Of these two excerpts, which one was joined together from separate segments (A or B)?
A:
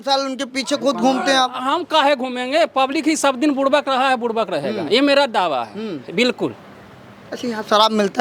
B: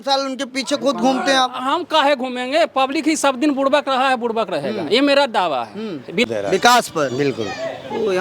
B